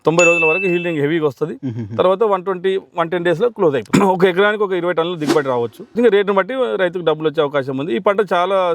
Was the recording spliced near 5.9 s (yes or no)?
yes